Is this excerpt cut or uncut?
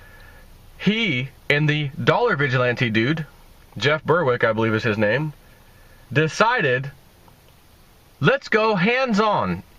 cut